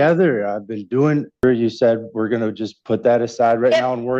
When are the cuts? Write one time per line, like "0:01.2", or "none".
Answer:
0:01.4